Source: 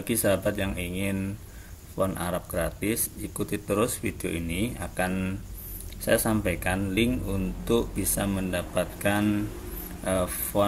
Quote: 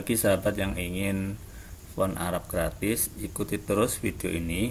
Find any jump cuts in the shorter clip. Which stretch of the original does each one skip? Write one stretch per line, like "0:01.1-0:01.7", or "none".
none